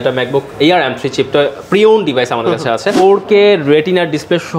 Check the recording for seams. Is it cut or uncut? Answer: cut